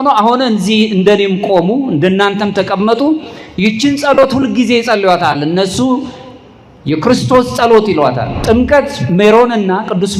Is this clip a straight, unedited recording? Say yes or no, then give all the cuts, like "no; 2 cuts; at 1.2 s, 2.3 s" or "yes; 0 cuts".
no; 1 cut; at 8.3 s